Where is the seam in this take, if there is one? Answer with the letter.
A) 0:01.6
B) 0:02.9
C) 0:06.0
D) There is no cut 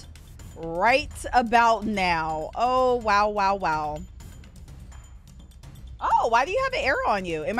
C